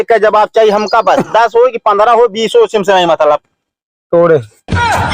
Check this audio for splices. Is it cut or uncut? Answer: uncut